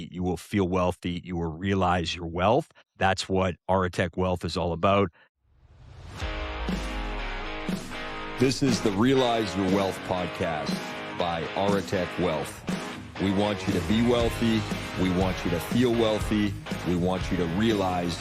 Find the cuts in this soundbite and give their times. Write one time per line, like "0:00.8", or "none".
0:05.3

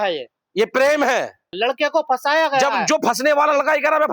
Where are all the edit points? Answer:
0:01.5

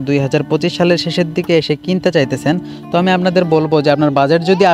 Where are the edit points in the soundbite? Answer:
none

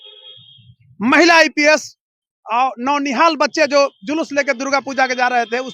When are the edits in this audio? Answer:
none

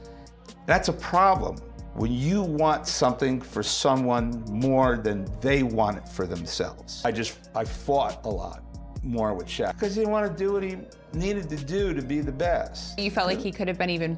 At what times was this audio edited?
0:06.9
0:09.8
0:13.0

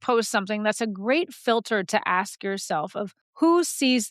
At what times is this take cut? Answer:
0:03.2

